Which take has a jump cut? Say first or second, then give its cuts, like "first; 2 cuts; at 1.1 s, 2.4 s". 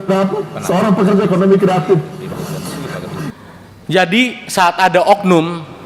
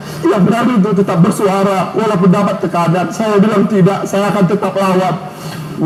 first; 1 cut; at 3.4 s